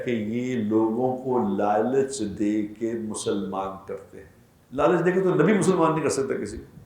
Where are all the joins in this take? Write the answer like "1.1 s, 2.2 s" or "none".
4.6 s